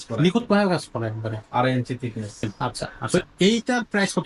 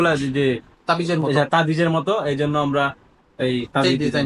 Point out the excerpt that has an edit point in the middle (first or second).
first